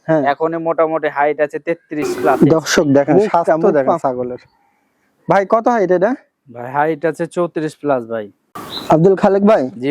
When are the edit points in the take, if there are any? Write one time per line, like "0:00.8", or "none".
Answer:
0:02.4
0:08.4